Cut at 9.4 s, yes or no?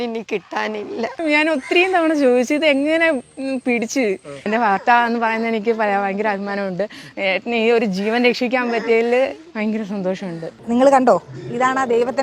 no